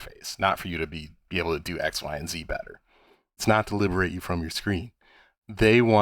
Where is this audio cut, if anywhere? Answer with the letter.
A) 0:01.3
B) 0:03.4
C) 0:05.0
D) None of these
B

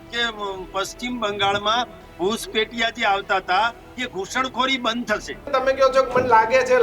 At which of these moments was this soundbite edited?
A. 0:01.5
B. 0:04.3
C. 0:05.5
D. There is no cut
C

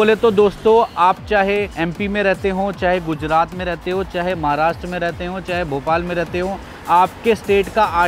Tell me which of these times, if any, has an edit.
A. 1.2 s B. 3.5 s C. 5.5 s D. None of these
D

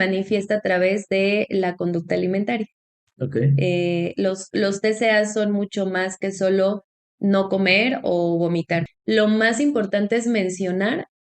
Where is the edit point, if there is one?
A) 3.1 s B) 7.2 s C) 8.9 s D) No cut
C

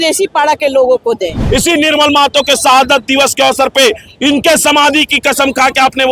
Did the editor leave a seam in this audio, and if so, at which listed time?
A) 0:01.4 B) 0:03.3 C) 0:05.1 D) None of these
A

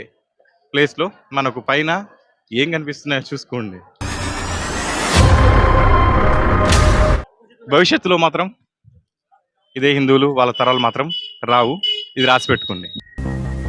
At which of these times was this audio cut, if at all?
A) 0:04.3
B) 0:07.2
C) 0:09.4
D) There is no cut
B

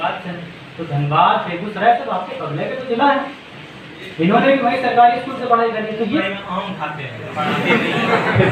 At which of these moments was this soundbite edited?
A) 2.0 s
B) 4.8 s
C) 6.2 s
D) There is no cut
C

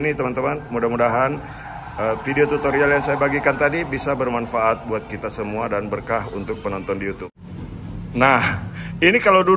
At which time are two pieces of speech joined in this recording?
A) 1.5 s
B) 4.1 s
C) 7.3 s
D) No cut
C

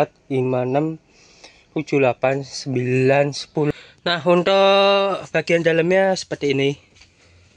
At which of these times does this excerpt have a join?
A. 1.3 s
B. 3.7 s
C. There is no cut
B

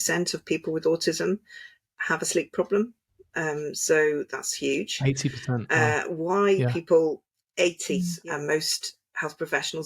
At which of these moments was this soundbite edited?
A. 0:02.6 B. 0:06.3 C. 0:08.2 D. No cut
C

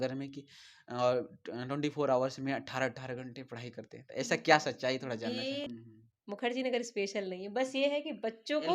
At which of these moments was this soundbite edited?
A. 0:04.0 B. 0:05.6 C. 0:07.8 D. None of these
B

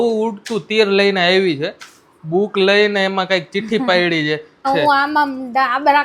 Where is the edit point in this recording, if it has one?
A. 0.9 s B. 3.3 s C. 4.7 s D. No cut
C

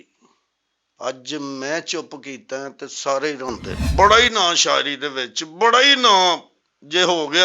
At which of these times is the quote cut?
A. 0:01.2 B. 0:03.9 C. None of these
B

